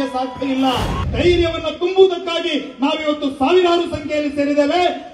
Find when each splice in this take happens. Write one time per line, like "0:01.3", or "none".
0:01.0